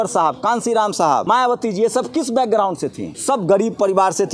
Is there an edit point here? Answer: yes; 2 cuts; at 1.2 s, 3.1 s

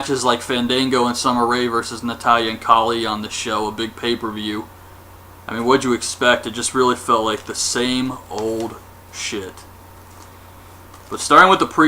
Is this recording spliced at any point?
yes; 1 cut; at 3.7 s

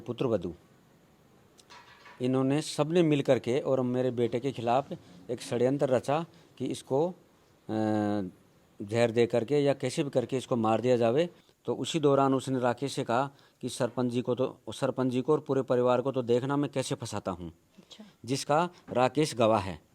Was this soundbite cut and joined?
yes; 1 cut; at 11.5 s

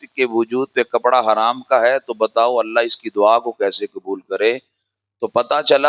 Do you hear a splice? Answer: no; 0 cuts

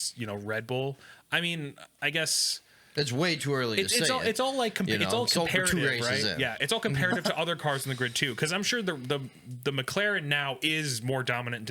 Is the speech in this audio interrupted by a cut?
no; 0 cuts

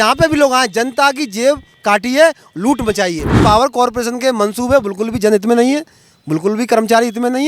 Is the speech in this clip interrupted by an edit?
yes; 1 cut; at 3.4 s

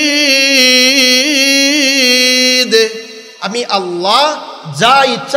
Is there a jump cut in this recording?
no; 0 cuts

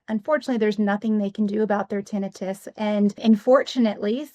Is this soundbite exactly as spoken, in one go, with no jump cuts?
no; 1 cut; at 3.2 s

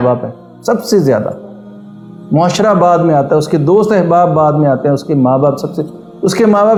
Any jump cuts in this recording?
no; 0 cuts

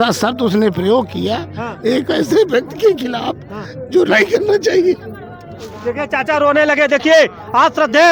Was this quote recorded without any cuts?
yes; 0 cuts

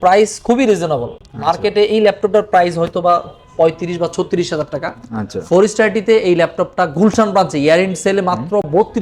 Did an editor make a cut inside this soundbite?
no; 0 cuts

